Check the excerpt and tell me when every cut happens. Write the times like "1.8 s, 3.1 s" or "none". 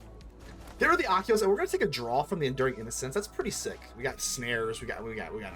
4.0 s